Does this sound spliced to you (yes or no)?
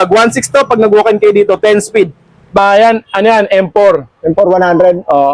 yes